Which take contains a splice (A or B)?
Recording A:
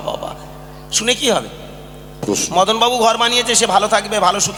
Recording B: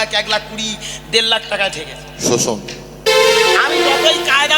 B